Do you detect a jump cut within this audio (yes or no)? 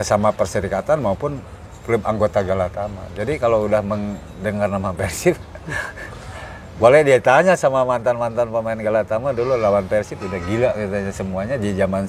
no